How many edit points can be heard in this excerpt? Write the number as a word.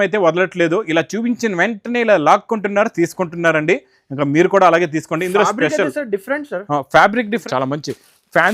one